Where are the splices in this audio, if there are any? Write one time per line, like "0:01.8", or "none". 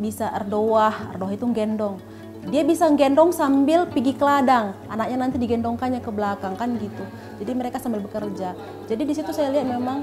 none